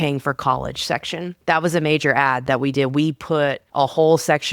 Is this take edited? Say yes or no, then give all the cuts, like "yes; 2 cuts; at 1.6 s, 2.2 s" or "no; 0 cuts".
yes; 2 cuts; at 1.3 s, 3.6 s